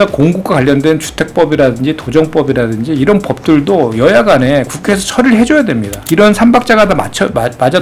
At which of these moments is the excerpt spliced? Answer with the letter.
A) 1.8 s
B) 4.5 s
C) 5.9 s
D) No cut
C